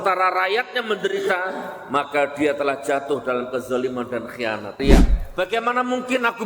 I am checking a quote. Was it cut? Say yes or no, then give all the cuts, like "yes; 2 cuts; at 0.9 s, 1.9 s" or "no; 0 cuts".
yes; 1 cut; at 4.8 s